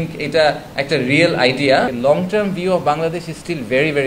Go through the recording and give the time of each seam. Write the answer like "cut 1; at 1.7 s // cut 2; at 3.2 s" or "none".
cut 1; at 1.9 s